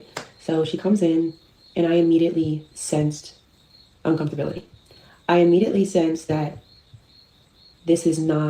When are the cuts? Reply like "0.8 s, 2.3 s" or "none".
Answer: none